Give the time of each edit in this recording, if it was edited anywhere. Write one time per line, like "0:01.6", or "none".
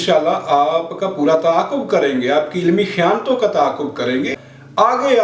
0:04.3